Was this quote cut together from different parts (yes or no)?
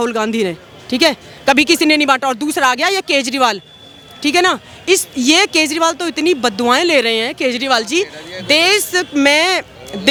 no